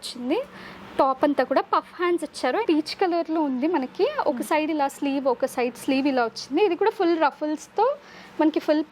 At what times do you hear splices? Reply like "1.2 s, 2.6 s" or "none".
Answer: 2.6 s